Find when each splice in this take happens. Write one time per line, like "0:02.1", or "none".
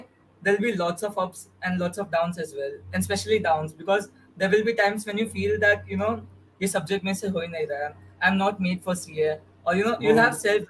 none